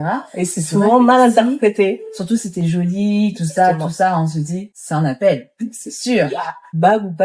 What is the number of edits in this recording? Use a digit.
0